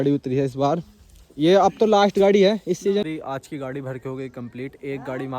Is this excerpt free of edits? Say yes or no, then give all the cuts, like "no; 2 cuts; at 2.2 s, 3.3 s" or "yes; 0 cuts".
no; 1 cut; at 3.0 s